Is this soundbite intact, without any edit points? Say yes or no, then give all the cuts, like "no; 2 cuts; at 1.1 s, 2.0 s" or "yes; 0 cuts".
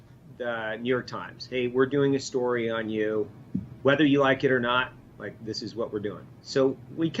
no; 2 cuts; at 3.4 s, 6.3 s